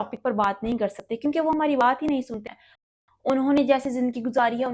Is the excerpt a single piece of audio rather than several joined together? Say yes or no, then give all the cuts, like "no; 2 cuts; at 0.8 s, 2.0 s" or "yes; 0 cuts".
no; 1 cut; at 2.4 s